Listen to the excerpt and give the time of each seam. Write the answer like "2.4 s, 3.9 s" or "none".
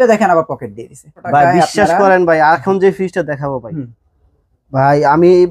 1.2 s